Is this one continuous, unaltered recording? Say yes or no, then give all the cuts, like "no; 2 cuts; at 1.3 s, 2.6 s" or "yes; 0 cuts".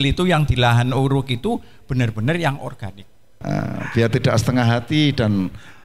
no; 1 cut; at 3.4 s